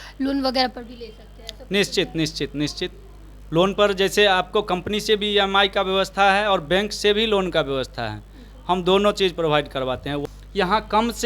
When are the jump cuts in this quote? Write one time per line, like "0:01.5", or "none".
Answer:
0:10.1